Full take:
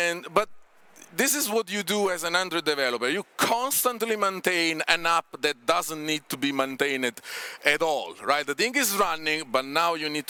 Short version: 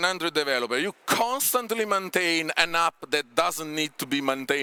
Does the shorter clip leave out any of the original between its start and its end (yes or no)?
no